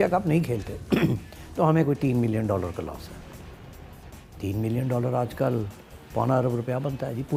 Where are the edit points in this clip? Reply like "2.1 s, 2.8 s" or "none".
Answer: none